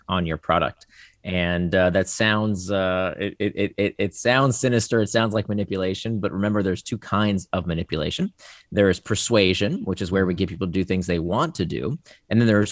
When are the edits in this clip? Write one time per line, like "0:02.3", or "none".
none